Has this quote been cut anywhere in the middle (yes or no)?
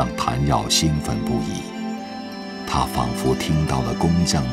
yes